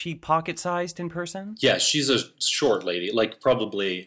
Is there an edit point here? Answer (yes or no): yes